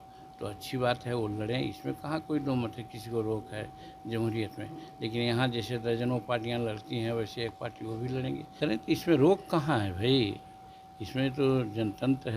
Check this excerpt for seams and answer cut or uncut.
cut